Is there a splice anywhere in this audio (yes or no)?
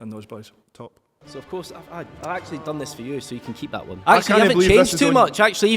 yes